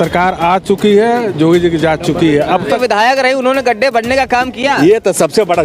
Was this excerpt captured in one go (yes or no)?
no